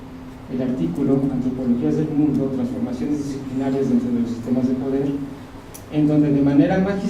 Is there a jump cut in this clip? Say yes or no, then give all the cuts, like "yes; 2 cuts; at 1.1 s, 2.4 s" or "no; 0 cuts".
no; 0 cuts